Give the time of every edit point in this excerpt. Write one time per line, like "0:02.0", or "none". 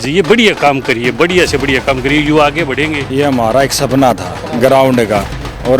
0:03.0